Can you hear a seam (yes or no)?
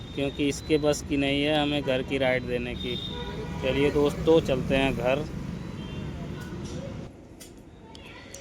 yes